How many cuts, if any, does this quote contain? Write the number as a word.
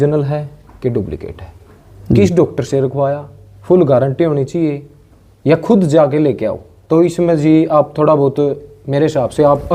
zero